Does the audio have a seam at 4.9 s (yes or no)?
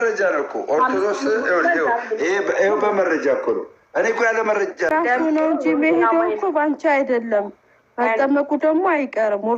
yes